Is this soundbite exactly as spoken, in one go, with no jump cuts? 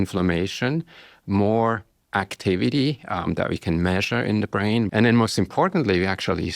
no; 1 cut; at 4.9 s

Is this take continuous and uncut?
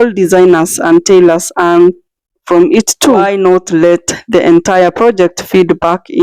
no; 1 cut; at 3.3 s

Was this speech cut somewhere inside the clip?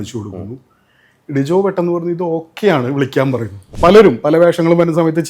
yes; 1 cut; at 3.6 s

